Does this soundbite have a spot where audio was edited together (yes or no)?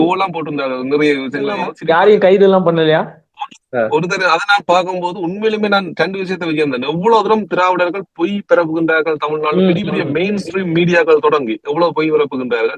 yes